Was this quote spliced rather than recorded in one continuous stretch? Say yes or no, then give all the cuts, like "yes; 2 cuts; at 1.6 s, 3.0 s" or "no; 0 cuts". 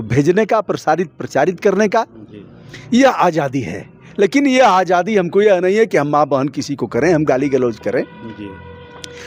no; 0 cuts